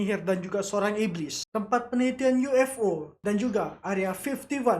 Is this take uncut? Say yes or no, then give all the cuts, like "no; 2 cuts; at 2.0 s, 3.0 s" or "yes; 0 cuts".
no; 2 cuts; at 1.5 s, 3.1 s